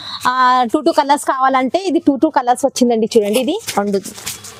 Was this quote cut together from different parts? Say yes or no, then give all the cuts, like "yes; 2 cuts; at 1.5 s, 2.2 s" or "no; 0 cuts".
no; 0 cuts